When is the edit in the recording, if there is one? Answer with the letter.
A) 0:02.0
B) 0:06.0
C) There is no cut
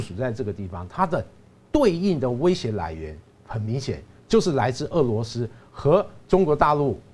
C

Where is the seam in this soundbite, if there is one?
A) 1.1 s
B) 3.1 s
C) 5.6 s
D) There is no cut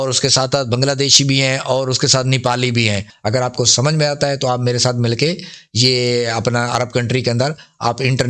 B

